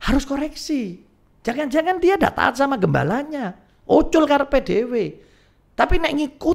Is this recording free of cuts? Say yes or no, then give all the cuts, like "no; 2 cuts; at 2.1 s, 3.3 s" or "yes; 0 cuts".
yes; 0 cuts